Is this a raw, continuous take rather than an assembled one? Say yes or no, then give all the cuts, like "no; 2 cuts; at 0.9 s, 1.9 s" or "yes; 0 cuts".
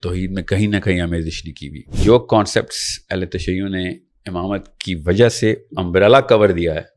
no; 1 cut; at 1.9 s